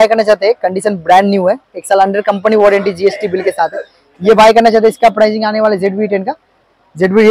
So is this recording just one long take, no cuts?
yes; 0 cuts

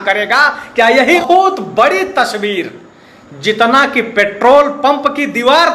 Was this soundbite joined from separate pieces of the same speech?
yes; 1 cut; at 1.2 s

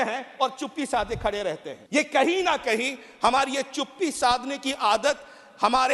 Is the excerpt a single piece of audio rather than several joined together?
no; 1 cut; at 1.7 s

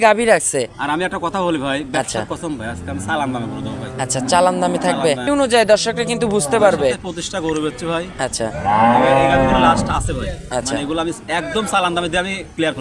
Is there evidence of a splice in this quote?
yes; 1 cut; at 5.3 s

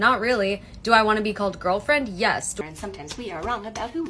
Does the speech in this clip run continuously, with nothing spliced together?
no; 1 cut; at 2.6 s

